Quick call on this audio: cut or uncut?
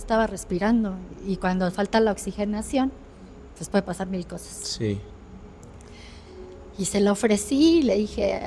uncut